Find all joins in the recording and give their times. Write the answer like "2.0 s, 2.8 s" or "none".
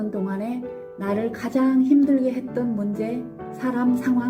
none